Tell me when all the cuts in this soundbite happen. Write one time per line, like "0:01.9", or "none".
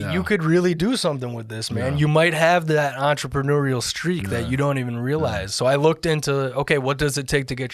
0:05.5